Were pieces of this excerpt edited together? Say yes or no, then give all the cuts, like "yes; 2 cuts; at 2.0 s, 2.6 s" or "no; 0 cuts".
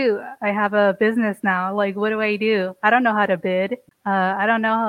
yes; 1 cut; at 3.9 s